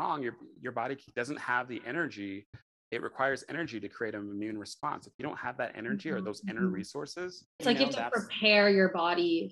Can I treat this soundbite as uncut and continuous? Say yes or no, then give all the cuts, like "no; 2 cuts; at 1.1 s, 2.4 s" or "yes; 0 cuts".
no; 1 cut; at 7.5 s